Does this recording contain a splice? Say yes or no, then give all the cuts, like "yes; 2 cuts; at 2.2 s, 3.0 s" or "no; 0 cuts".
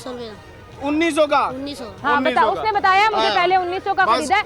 no; 0 cuts